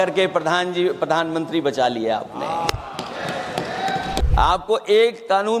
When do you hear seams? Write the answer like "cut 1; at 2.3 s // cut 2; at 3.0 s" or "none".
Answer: cut 1; at 4.2 s